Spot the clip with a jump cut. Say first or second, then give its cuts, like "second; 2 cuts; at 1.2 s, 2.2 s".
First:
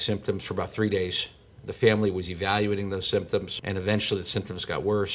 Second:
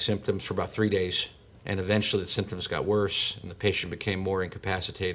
second; 1 cut; at 1.6 s